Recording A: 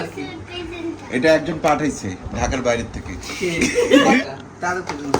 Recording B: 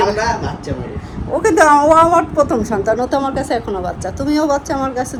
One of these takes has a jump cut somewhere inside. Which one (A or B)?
A